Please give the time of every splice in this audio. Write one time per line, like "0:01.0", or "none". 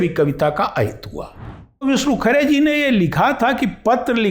0:01.8